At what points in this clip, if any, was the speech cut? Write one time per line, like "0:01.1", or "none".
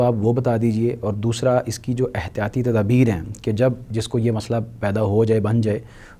none

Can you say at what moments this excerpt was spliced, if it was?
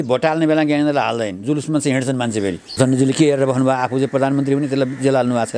0:02.8

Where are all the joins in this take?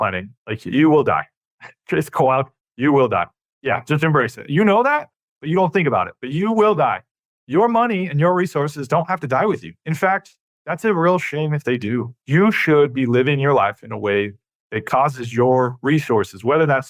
none

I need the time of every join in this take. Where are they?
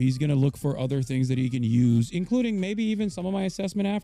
none

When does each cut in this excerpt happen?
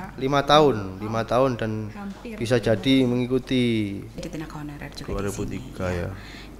0:04.2

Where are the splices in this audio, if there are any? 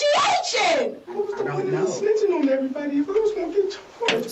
0:01.2

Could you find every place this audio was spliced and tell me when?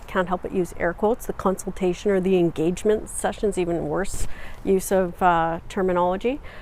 none

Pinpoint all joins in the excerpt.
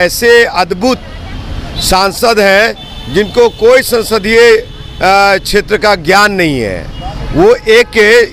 none

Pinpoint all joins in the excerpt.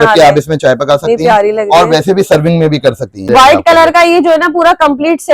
0:03.2

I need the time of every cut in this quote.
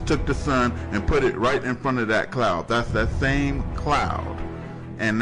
0:01.3

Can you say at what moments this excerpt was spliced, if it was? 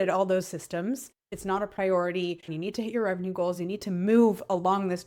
0:01.3
0:02.5

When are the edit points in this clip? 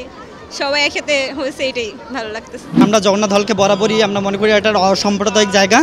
0:02.8

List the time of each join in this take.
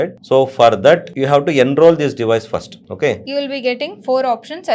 0:03.2

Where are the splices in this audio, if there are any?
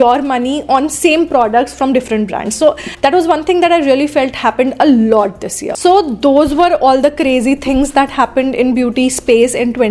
none

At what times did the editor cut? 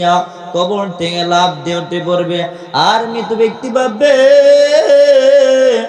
none

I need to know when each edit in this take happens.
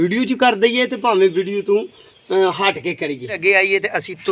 0:03.4

